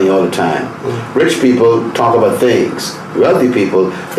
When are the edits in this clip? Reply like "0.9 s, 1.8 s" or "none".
none